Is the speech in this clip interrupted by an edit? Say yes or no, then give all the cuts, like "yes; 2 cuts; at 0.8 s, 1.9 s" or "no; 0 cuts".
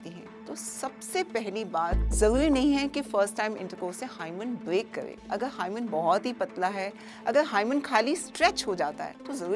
yes; 1 cut; at 2.0 s